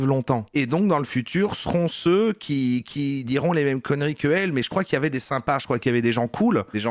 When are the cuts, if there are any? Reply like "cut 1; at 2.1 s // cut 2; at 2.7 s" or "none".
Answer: none